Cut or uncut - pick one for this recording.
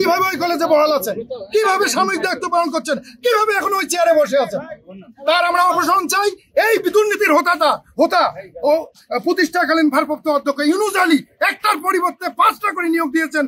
uncut